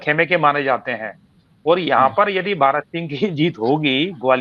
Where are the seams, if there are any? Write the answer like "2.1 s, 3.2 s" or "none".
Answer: none

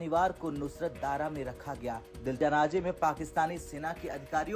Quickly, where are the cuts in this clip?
2.4 s

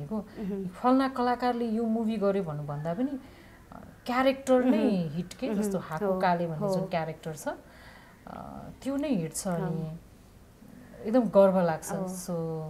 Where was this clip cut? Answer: none

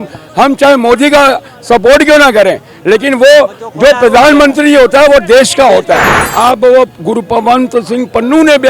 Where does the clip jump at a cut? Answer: 6.2 s

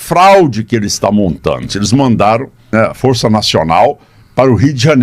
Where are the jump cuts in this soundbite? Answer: 1.7 s, 2.7 s

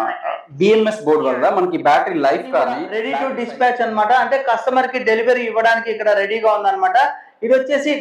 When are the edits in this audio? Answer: 2.9 s

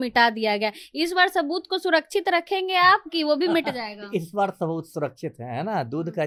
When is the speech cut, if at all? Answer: none

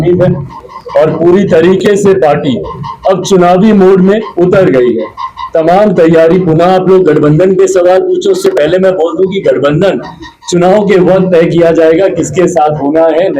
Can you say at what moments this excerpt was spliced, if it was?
none

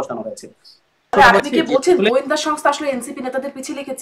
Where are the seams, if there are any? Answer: 1.1 s

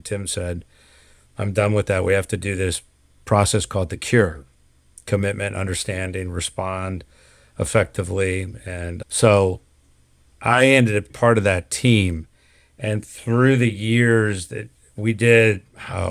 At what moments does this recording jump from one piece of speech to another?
11.1 s

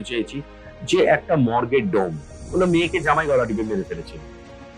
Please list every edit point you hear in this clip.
2.4 s

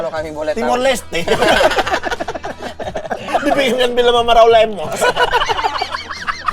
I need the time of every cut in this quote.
3.3 s

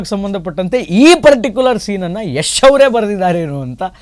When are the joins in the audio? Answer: none

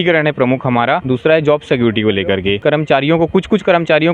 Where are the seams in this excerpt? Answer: 1.0 s, 2.6 s

